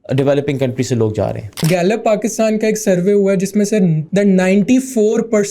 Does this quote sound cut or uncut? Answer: cut